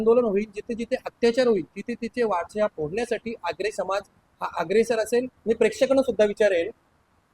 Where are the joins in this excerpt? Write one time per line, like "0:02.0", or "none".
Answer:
0:05.3